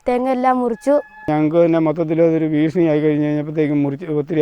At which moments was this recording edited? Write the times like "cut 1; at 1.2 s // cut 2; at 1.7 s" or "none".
cut 1; at 1.3 s